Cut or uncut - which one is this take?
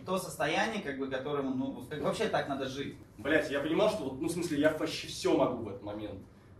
cut